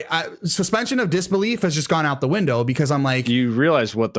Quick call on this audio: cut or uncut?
cut